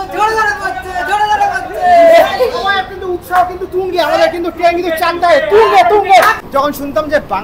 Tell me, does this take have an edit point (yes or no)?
yes